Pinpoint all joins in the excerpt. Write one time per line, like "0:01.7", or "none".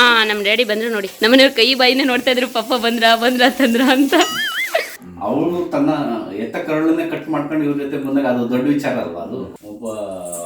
0:01.1
0:04.9
0:09.5